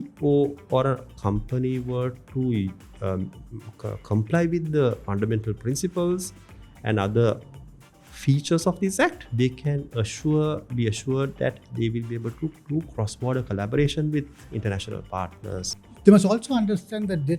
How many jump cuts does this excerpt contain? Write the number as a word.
three